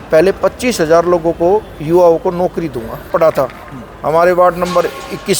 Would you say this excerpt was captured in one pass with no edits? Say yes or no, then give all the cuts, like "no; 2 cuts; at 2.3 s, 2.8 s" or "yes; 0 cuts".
no; 1 cut; at 3.1 s